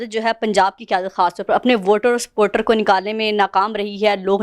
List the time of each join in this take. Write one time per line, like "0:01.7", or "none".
none